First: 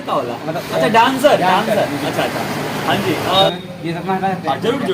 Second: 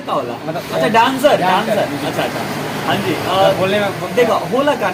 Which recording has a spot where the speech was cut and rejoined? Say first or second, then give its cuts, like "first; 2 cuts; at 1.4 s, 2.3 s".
first; 1 cut; at 3.5 s